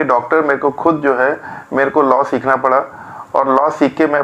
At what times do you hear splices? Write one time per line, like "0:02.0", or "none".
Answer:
none